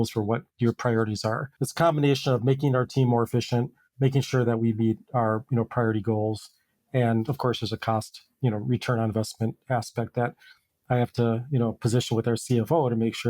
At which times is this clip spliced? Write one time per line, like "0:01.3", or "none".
0:01.6